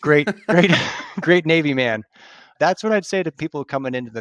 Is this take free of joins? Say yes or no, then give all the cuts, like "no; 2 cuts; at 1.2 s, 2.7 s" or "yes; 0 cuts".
no; 1 cut; at 2.5 s